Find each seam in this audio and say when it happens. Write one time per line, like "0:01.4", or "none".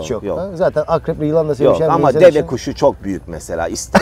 none